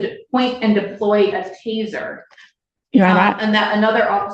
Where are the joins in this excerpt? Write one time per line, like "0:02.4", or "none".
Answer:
none